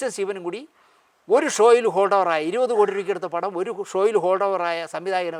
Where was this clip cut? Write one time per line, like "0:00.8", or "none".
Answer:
none